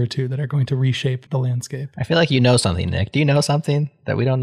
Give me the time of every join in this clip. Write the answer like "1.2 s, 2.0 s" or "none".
1.2 s